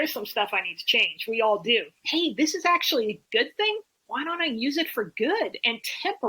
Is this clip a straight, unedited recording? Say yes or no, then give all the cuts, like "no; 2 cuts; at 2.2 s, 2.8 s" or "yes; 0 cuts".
no; 1 cut; at 2.0 s